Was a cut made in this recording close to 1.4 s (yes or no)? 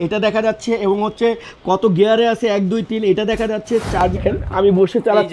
no